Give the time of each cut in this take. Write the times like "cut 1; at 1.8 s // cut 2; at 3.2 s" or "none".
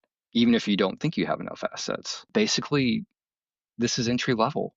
cut 1; at 2.2 s